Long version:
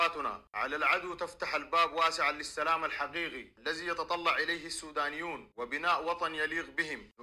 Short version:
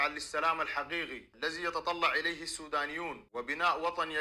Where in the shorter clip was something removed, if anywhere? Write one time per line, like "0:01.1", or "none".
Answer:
none

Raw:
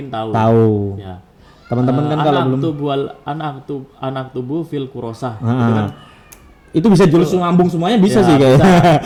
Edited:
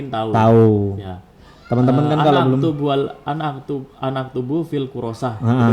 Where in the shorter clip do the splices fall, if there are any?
none

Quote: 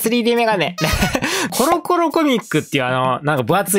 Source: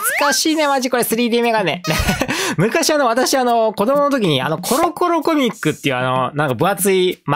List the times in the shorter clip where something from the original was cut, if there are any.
0:01.5

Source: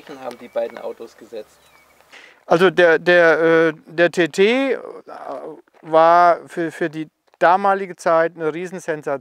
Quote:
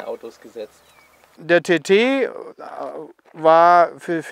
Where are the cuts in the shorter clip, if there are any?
0:01.3

